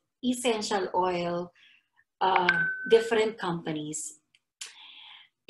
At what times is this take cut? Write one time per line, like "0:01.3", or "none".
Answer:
none